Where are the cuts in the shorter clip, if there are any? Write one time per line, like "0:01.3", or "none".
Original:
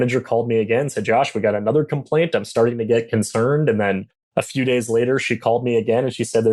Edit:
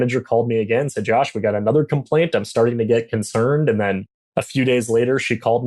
none